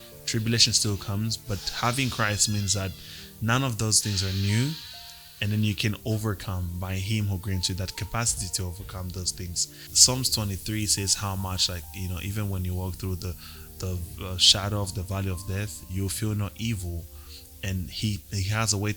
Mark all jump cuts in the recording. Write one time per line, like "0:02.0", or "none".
0:09.8